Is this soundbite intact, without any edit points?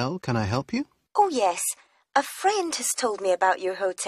no; 1 cut; at 1.0 s

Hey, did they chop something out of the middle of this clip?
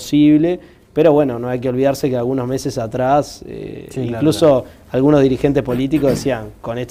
no; 0 cuts

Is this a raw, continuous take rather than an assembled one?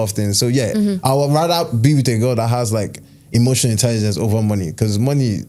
yes; 0 cuts

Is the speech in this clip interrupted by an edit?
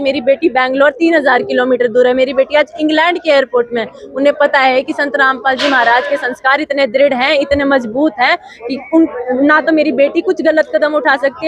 no; 0 cuts

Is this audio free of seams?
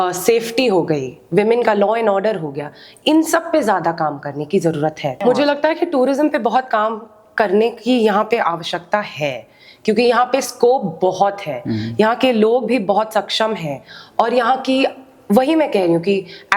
no; 1 cut; at 5.2 s

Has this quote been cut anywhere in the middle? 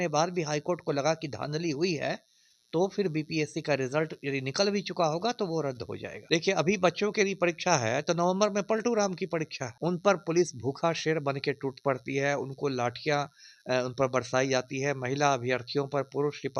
yes; 2 cuts; at 6.1 s, 9.6 s

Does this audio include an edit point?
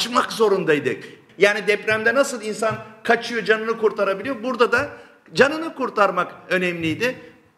yes; 1 cut; at 1.1 s

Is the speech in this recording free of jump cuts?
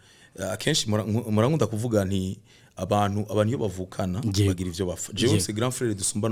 yes; 0 cuts

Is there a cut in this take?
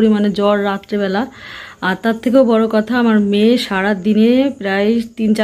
no; 0 cuts

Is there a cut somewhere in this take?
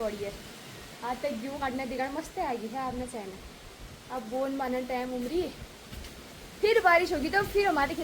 no; 0 cuts

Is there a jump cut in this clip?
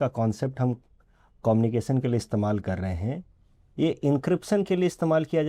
no; 0 cuts

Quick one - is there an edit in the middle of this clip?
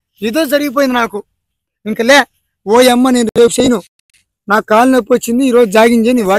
no; 0 cuts

